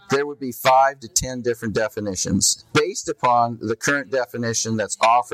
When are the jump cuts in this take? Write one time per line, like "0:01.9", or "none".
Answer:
0:02.6